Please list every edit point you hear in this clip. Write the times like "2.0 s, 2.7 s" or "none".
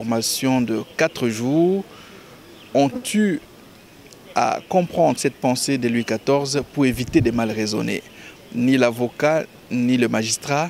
8.3 s